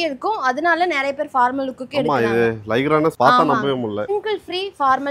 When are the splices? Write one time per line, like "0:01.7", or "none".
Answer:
0:03.1
0:04.1

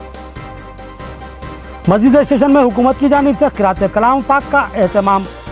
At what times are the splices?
0:01.4

